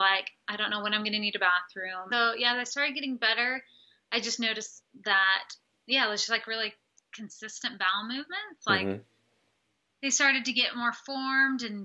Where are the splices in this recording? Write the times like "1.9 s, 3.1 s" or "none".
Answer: 2.0 s